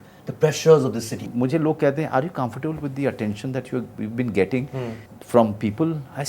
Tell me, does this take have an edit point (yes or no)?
yes